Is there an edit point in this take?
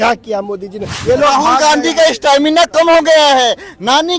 yes; 1 cut; at 1.0 s

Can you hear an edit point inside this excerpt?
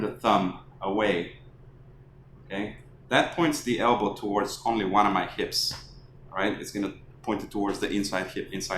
no; 0 cuts

